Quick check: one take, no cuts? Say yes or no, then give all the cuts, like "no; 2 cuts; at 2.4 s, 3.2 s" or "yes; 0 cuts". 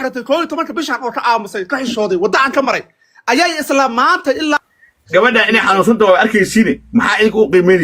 no; 1 cut; at 4.7 s